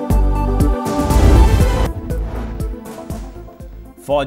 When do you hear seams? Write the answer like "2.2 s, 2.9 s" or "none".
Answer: 1.9 s

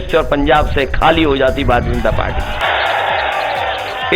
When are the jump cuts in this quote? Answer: 2.6 s

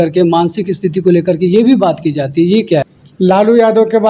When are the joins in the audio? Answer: 2.9 s

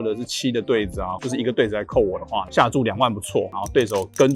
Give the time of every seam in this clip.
1.1 s, 2.5 s, 3.5 s

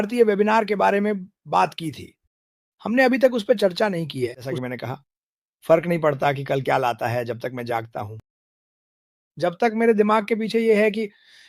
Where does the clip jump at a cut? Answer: none

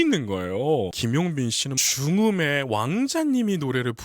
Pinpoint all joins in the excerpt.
1.0 s

